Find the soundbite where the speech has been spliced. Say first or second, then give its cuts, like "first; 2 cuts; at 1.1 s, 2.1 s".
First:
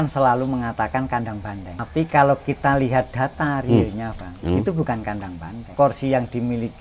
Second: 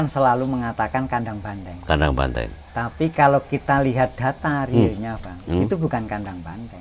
first; 2 cuts; at 1.8 s, 5.7 s